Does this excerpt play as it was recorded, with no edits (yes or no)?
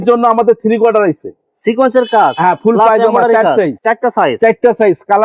yes